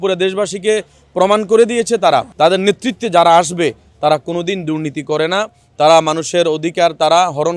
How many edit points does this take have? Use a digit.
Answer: 1